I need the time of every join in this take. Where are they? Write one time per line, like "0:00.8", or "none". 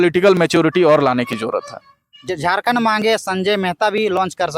0:02.3